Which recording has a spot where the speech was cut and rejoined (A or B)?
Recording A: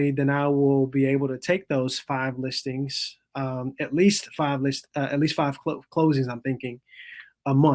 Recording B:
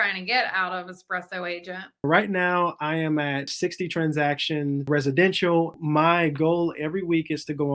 B